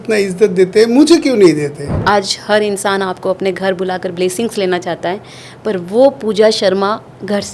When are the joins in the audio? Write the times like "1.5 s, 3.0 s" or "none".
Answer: 1.9 s